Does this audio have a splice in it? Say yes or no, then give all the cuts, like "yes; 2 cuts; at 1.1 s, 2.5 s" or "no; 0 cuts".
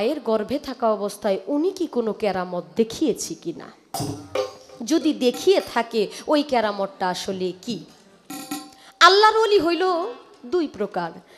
no; 0 cuts